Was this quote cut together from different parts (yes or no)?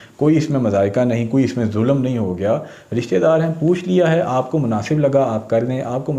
no